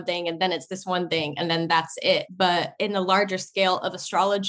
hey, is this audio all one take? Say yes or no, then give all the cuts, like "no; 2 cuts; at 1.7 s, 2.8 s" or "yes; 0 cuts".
no; 1 cut; at 2.4 s